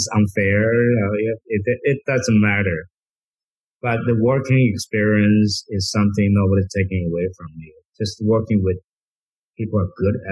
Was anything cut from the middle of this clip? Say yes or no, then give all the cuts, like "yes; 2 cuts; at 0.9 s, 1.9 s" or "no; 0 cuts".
no; 0 cuts